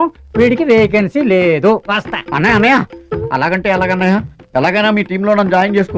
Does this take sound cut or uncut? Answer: uncut